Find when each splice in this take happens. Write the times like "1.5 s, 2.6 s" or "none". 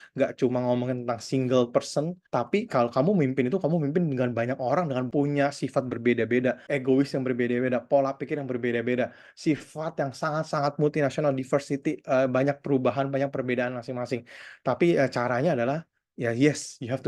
2.2 s, 5.1 s, 6.6 s